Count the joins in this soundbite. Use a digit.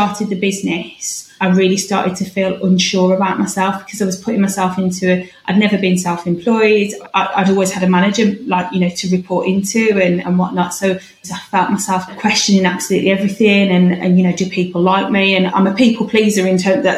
1